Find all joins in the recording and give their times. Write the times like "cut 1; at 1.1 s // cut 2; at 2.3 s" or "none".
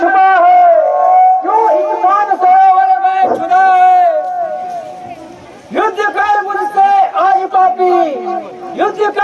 none